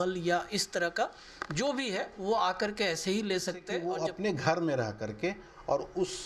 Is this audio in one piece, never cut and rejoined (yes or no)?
no